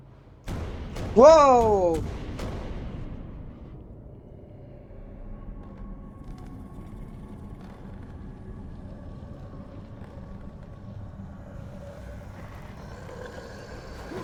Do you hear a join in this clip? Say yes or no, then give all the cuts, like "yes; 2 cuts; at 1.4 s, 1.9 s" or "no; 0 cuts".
no; 0 cuts